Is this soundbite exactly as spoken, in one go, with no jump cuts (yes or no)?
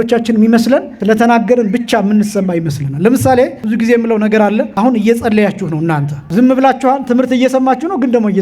no